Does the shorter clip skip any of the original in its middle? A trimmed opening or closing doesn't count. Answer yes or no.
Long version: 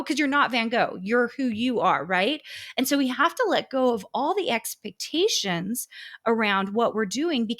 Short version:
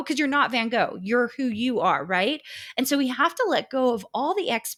no